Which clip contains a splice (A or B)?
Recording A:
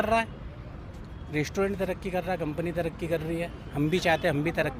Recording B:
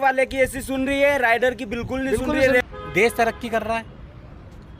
B